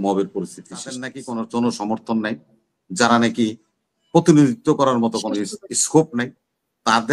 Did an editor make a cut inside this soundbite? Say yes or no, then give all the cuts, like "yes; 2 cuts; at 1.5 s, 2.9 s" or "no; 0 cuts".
yes; 1 cut; at 1.2 s